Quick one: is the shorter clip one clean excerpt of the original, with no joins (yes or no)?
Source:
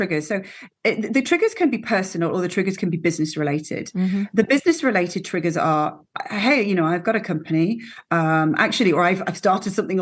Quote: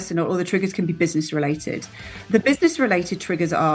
yes